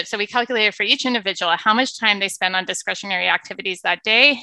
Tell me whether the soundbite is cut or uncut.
uncut